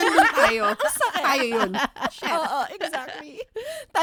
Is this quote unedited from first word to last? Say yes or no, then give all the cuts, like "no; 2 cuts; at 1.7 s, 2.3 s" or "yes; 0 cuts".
yes; 0 cuts